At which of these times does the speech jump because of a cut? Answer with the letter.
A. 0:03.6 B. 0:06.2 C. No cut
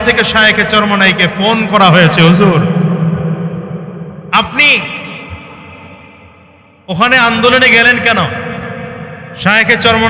C